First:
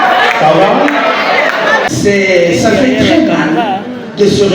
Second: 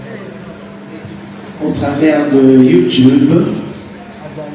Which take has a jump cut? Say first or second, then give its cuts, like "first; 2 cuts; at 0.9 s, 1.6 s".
first; 1 cut; at 1.9 s